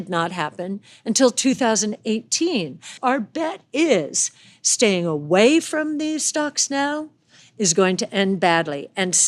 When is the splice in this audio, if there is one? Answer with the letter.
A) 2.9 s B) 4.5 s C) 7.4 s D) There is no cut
A